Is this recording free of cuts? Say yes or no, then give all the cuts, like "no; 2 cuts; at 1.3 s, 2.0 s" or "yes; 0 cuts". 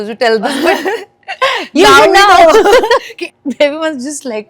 no; 1 cut; at 3.2 s